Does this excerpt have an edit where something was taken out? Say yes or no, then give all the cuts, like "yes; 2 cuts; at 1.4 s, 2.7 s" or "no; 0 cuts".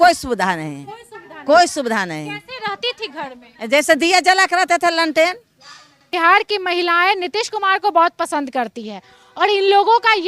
yes; 1 cut; at 6.1 s